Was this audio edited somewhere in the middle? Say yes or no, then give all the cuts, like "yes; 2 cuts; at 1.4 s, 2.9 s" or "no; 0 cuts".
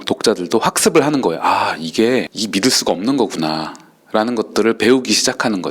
no; 0 cuts